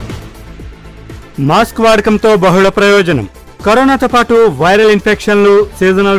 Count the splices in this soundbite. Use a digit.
0